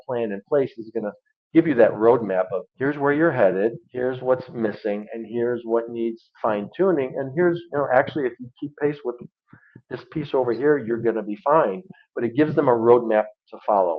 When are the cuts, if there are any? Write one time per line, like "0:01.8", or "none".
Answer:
0:02.6
0:03.8